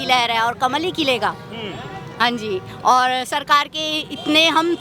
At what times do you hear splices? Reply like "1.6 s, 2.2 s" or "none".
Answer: none